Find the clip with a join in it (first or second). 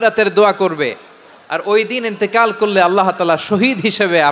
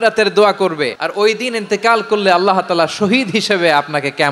second